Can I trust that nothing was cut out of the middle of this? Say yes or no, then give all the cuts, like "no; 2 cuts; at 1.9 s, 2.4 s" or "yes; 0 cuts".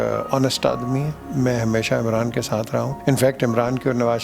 no; 2 cuts; at 1.2 s, 2.9 s